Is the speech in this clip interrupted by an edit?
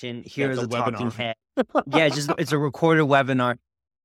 no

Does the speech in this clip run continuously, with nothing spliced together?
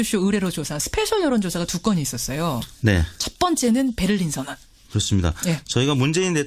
yes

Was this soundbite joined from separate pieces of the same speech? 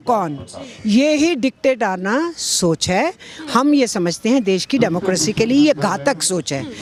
no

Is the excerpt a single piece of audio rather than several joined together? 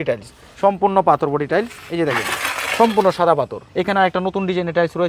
no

